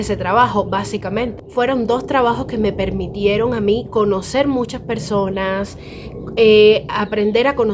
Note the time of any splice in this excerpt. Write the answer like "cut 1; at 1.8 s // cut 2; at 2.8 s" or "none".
none